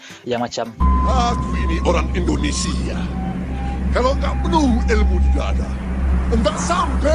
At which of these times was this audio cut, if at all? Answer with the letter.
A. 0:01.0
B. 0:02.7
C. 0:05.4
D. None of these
D